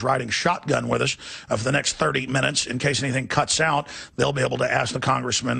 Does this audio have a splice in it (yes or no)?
no